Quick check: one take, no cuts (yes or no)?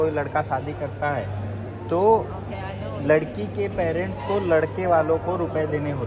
yes